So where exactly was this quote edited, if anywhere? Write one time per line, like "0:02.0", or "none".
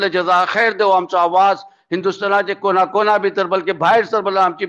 none